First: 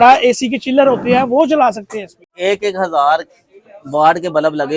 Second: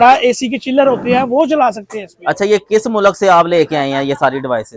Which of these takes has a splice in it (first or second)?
first